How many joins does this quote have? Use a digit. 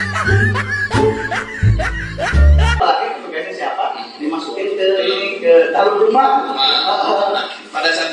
1